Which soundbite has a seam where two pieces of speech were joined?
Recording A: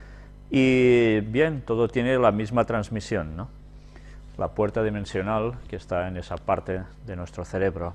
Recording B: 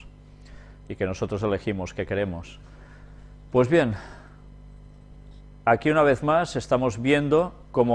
B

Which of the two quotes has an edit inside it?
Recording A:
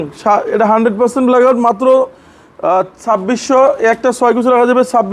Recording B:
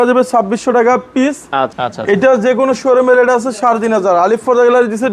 B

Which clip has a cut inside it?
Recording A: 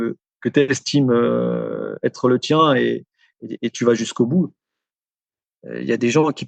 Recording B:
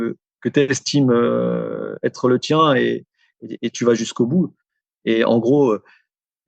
A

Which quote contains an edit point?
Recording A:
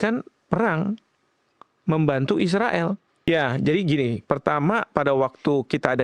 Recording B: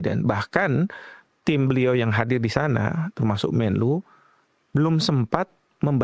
A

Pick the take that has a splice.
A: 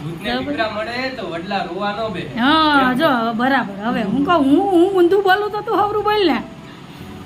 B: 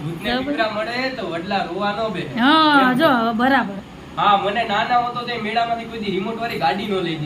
B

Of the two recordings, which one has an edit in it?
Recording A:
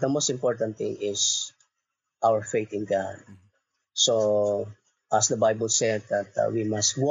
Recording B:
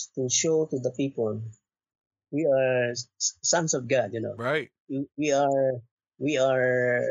B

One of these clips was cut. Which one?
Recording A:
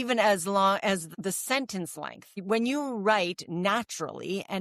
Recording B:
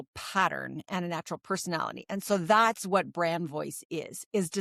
A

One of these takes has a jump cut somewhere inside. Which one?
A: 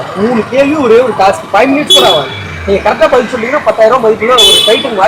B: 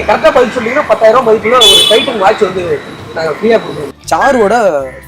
B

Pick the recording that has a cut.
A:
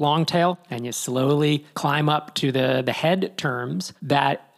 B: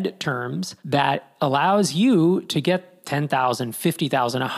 A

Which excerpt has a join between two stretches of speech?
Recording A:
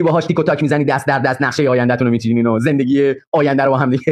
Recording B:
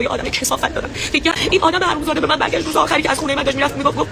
B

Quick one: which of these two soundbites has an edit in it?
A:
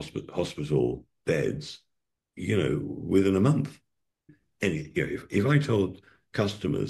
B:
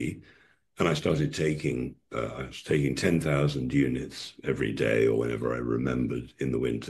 A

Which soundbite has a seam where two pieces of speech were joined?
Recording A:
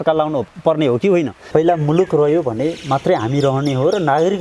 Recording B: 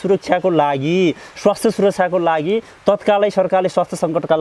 A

